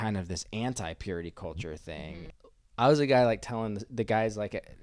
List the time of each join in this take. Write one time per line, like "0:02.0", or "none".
0:02.5